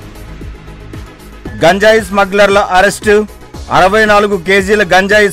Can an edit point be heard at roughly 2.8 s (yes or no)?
no